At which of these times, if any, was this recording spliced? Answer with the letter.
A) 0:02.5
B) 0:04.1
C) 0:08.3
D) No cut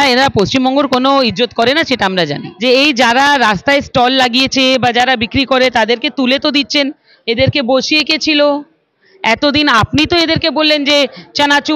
A